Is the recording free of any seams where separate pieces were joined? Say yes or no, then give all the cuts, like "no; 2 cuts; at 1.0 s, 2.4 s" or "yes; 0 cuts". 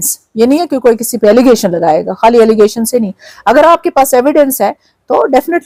yes; 0 cuts